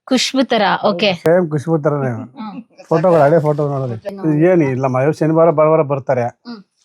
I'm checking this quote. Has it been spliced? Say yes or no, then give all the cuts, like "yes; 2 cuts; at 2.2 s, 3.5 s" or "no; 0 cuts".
yes; 1 cut; at 4.1 s